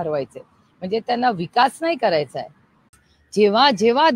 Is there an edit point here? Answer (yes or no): yes